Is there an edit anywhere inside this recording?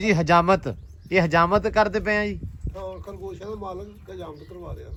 no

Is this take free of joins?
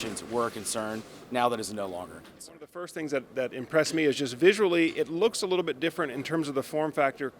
no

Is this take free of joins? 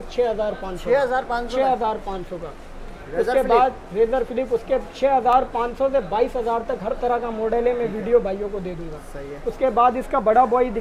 yes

